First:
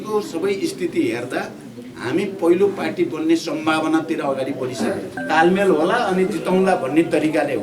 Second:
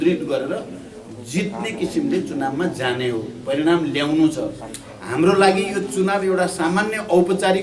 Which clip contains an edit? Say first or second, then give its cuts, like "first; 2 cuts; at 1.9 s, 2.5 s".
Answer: first; 1 cut; at 5.2 s